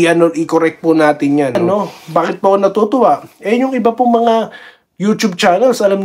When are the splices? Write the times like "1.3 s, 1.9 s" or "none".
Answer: 1.6 s